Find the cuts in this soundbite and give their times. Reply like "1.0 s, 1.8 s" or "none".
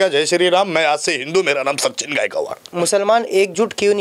2.7 s